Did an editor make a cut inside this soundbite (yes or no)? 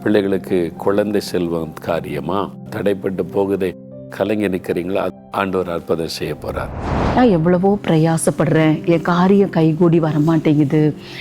yes